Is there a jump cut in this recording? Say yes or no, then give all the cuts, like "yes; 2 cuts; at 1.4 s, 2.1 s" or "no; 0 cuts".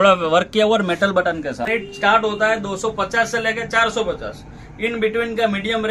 yes; 1 cut; at 1.7 s